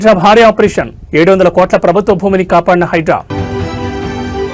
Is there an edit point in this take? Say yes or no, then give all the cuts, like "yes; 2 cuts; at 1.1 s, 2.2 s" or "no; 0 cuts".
yes; 1 cut; at 3.3 s